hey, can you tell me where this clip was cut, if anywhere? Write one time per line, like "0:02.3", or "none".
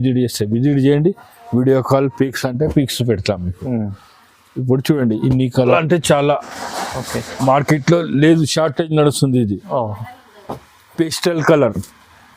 0:05.7